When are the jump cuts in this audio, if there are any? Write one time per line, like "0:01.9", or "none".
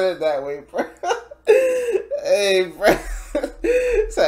none